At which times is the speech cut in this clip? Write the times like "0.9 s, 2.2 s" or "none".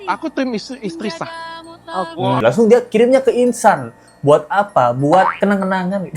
2.4 s